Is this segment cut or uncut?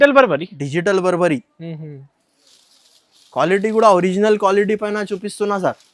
uncut